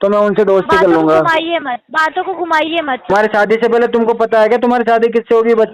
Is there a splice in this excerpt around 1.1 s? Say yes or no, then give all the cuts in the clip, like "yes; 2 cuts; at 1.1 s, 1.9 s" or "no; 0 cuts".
no; 1 cut; at 3.1 s